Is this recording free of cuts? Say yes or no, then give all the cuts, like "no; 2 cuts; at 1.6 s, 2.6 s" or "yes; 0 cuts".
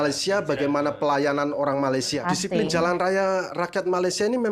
no; 1 cut; at 2.2 s